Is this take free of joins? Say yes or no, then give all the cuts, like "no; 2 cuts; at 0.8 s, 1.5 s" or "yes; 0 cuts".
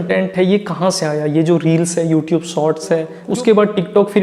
no; 1 cut; at 3.3 s